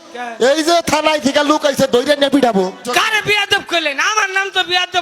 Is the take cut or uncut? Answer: cut